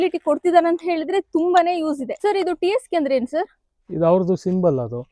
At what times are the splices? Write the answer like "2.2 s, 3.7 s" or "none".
2.2 s